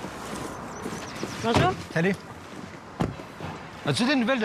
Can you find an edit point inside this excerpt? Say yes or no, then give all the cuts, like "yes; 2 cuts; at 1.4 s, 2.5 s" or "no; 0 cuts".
no; 0 cuts